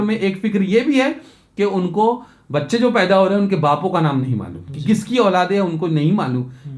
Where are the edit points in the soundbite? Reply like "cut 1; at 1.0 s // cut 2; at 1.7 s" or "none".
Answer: none

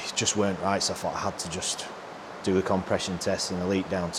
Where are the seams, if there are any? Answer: none

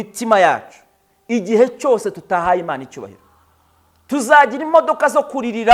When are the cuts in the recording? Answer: none

